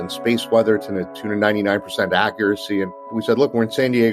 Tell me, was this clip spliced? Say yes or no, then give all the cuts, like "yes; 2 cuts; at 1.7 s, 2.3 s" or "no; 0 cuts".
yes; 1 cut; at 3.1 s